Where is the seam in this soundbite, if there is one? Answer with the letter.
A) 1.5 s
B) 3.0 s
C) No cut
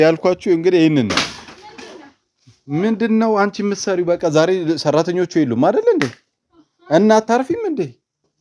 C